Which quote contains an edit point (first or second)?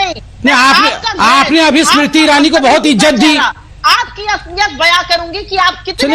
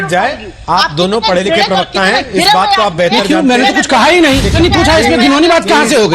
second